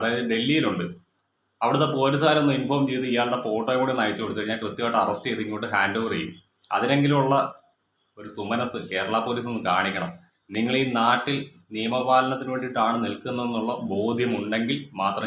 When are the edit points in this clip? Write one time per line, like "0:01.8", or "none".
none